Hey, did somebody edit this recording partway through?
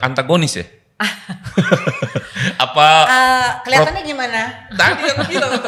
no; 0 cuts

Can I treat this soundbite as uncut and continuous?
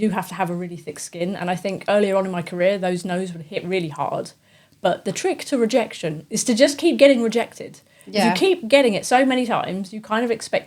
yes; 0 cuts

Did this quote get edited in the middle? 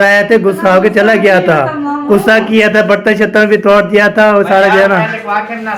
no; 0 cuts

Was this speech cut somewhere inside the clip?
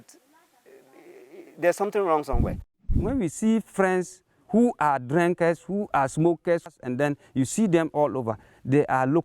yes; 2 cuts; at 2.9 s, 6.7 s

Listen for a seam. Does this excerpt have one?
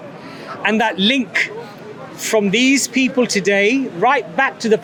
no; 0 cuts

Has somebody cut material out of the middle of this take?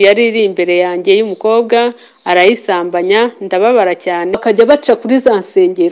yes; 1 cut; at 4.4 s

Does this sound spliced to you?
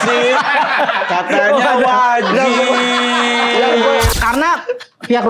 yes; 1 cut; at 4.1 s

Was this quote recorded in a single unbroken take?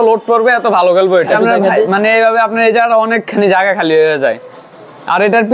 no; 1 cut; at 1.3 s

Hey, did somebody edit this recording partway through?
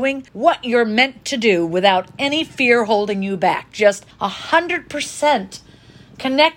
no; 0 cuts

